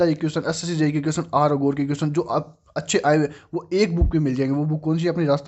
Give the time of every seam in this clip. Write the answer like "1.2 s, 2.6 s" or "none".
none